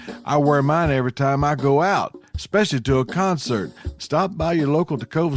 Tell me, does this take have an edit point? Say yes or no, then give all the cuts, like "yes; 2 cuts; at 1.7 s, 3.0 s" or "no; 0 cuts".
no; 0 cuts